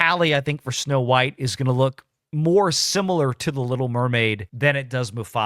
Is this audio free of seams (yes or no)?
no